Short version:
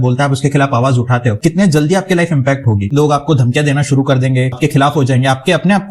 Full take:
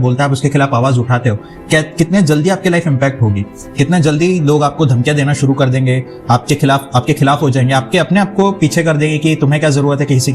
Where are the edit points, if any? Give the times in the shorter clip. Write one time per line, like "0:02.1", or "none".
0:01.4
0:02.9
0:04.6